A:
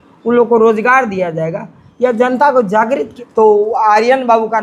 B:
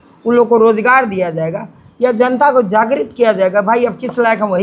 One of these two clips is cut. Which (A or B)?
A